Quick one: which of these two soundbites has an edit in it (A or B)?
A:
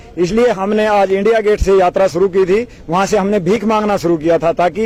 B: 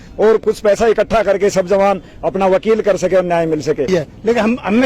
B